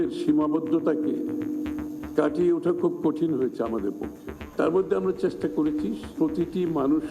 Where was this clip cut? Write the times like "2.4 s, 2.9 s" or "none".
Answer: 6.1 s